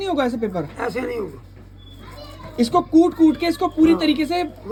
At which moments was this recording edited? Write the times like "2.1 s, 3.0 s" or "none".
none